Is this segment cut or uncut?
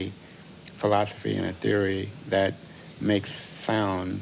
cut